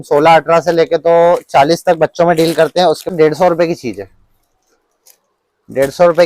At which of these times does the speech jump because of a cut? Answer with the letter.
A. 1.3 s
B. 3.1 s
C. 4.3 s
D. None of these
B